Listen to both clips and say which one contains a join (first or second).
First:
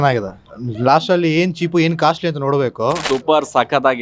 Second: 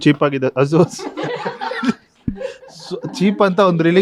first